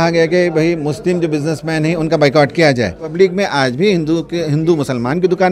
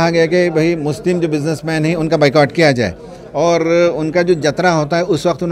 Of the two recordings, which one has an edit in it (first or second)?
first